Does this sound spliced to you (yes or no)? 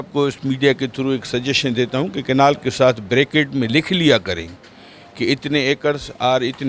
no